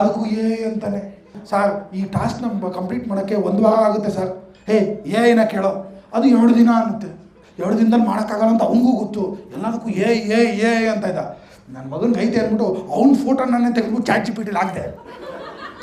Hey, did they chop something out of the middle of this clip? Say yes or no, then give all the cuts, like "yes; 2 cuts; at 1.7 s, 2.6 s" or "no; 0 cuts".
yes; 1 cut; at 1.4 s